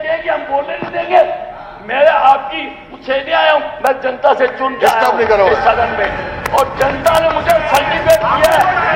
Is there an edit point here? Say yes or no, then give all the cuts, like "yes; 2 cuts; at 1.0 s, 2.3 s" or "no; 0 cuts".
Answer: no; 0 cuts